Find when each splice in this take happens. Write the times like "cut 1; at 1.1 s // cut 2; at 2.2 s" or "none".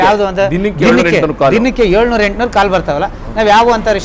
none